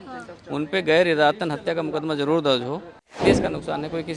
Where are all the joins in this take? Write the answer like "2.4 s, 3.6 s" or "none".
3.2 s